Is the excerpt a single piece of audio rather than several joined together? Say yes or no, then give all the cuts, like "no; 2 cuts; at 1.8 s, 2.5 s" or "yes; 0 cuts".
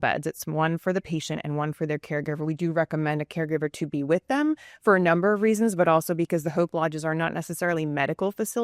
yes; 0 cuts